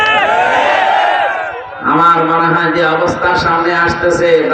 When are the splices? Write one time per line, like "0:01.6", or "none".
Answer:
none